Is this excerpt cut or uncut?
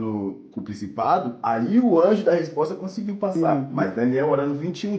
cut